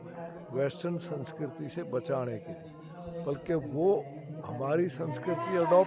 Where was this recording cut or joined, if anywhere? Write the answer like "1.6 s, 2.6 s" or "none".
none